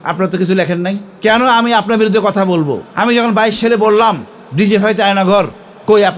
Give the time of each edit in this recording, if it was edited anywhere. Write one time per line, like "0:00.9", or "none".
0:01.1
0:02.8

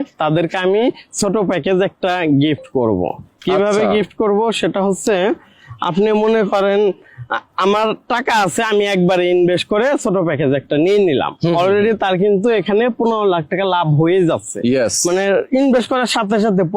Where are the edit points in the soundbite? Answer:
none

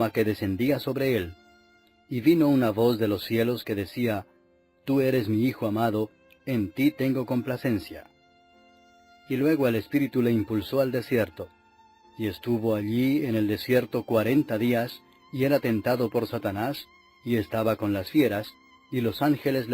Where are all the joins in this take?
0:08.6

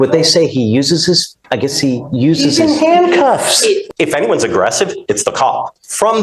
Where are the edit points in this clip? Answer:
0:03.9

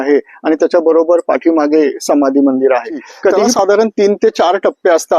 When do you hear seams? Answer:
0:03.5

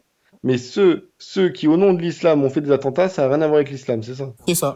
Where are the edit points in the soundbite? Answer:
none

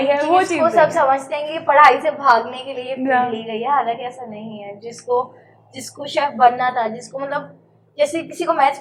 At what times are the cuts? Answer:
none

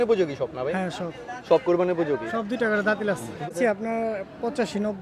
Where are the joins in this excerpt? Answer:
0:03.4

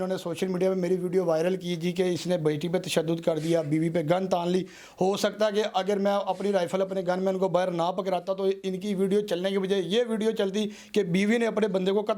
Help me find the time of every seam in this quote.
none

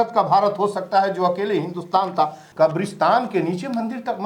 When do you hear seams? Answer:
0:02.4

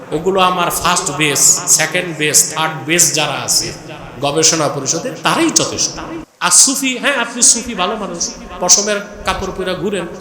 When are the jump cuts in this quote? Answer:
0:06.3

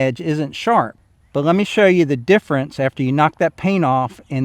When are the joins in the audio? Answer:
0:01.0

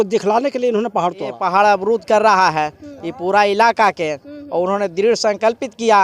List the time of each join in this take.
0:01.3

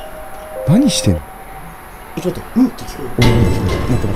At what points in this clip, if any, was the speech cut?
none

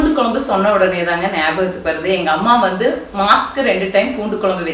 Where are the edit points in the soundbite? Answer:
none

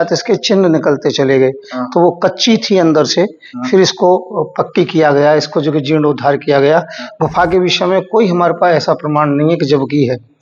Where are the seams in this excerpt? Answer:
none

